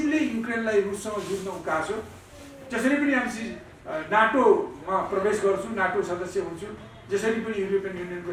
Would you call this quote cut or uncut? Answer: uncut